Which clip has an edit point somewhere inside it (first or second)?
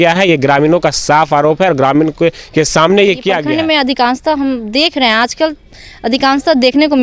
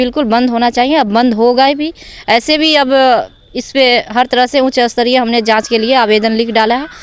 first